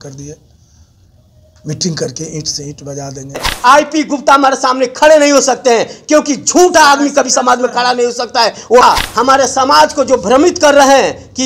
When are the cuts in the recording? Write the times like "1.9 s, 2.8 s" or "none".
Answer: 3.5 s, 8.8 s